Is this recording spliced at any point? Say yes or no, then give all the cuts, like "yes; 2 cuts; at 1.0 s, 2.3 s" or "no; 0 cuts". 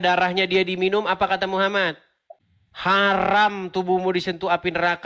yes; 1 cut; at 2.9 s